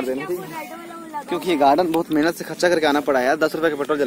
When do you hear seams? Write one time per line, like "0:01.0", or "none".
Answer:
none